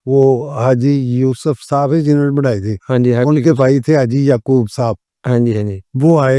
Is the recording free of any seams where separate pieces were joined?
yes; 0 cuts

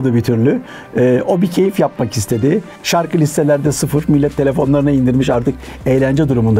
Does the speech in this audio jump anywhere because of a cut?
yes; 1 cut; at 2.8 s

